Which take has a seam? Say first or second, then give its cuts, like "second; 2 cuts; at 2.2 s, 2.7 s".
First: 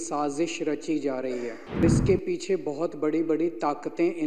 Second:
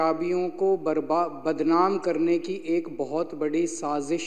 first; 1 cut; at 1.8 s